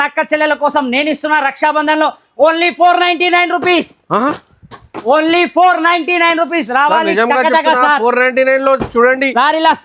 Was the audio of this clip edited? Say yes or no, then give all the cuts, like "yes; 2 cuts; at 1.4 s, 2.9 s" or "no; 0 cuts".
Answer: no; 0 cuts